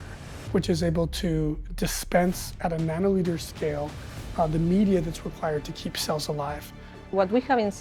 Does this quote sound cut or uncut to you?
cut